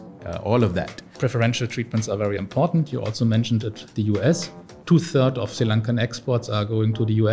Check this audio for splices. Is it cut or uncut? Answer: cut